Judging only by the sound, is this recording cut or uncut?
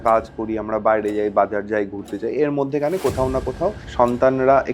cut